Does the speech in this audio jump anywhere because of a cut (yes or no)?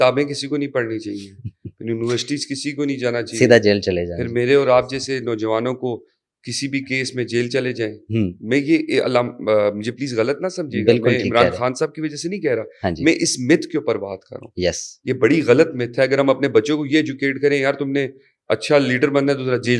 no